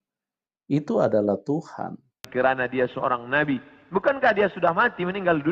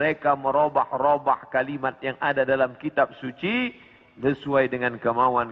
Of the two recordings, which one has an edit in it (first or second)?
first